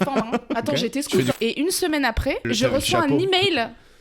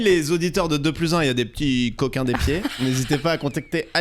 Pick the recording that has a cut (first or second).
first